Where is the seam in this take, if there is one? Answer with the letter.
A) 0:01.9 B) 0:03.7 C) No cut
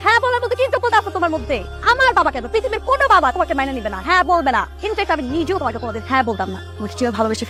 C